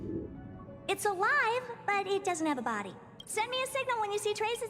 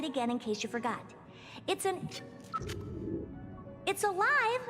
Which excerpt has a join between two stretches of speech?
first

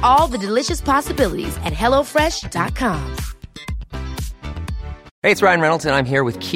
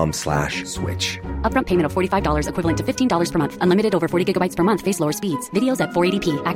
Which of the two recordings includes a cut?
first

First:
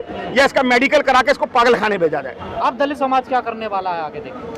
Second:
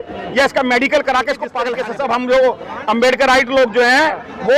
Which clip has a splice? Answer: second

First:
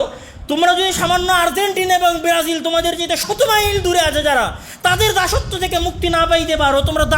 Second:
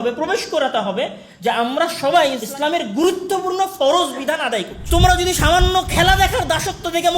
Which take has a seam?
second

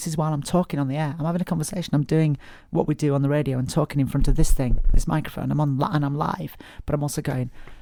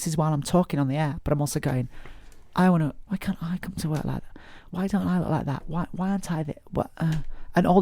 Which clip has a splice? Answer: second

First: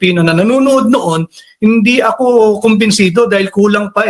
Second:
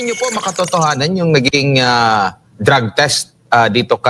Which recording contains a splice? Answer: second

